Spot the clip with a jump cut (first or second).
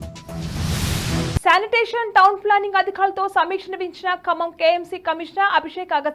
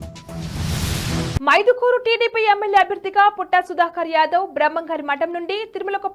second